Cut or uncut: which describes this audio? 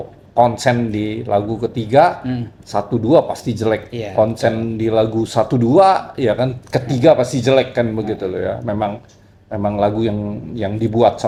uncut